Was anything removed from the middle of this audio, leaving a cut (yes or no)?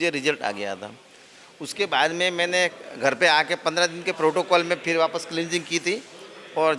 no